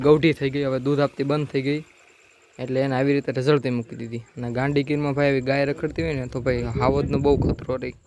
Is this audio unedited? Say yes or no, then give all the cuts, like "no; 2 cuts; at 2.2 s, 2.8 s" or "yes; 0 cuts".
yes; 0 cuts